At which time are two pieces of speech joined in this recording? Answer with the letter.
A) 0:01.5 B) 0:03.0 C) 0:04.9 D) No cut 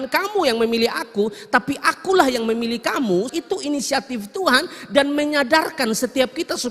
D